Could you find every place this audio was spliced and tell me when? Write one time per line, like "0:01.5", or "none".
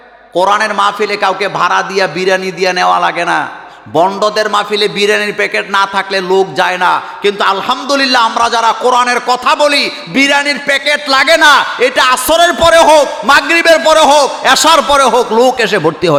none